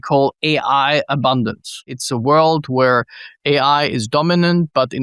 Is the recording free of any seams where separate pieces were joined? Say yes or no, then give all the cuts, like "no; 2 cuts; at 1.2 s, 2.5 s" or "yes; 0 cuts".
no; 1 cut; at 1.9 s